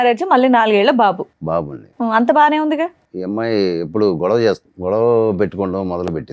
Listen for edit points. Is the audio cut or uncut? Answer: cut